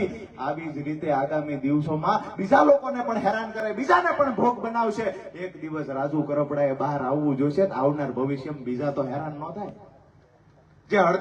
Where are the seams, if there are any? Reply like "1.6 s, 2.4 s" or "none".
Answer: none